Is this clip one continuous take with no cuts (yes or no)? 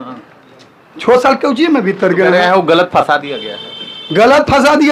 yes